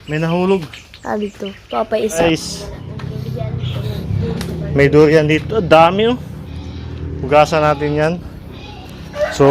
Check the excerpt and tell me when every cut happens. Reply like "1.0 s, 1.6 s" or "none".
2.2 s